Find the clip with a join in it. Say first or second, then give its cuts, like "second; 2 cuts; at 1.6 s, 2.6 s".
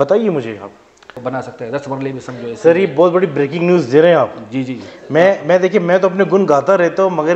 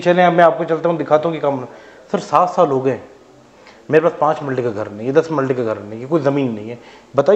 first; 1 cut; at 1.2 s